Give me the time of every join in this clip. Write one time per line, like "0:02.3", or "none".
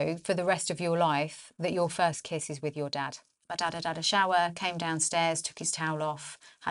0:03.4